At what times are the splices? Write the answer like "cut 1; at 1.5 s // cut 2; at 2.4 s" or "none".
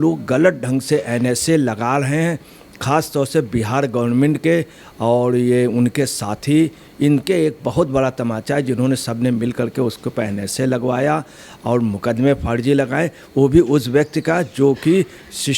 none

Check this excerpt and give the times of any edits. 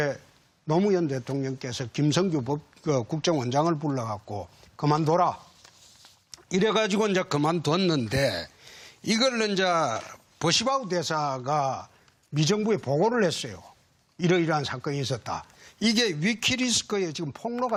none

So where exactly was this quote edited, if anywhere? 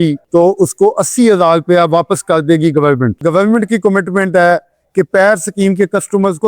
cut 1; at 3.2 s

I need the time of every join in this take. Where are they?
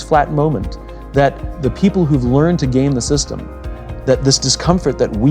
cut 1; at 1.5 s

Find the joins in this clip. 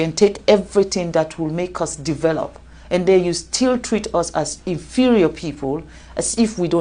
none

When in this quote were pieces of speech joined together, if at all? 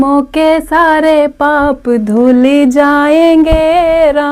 none

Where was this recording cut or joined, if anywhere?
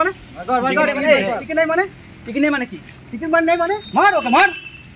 cut 1; at 3.8 s

